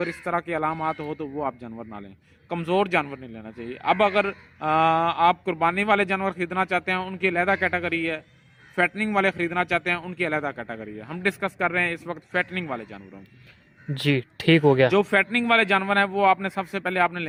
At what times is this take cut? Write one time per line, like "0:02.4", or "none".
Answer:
none